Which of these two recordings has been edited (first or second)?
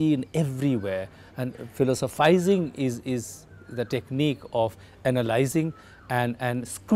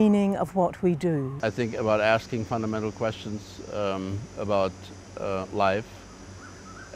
second